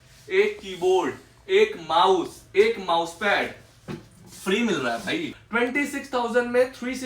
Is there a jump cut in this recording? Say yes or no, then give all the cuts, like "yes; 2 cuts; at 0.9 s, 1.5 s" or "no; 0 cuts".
yes; 1 cut; at 5.4 s